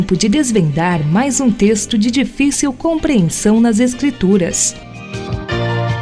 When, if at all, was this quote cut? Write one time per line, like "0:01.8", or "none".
0:04.7